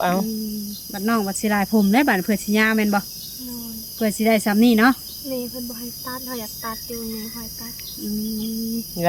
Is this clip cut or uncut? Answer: uncut